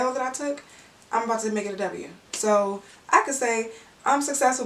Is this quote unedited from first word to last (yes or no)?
no